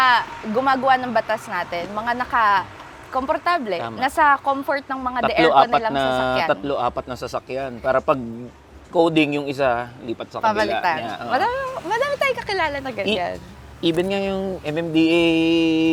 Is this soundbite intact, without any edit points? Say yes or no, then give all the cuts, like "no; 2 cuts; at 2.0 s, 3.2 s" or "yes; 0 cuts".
yes; 0 cuts